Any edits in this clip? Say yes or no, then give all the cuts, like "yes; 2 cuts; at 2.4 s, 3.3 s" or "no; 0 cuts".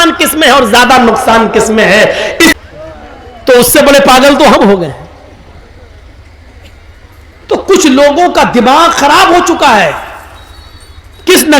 yes; 1 cut; at 2.6 s